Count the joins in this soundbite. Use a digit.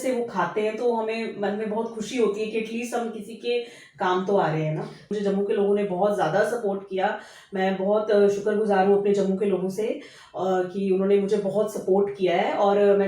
1